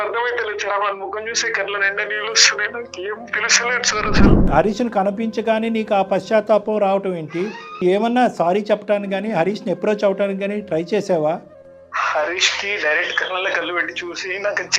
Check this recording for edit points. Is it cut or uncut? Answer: cut